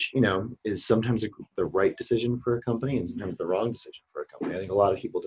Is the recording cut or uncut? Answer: uncut